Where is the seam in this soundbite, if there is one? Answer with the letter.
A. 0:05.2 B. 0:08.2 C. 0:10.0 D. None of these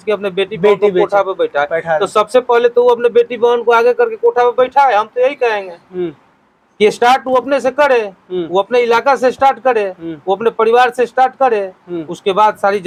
D